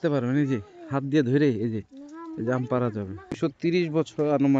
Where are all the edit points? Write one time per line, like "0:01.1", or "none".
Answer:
0:03.4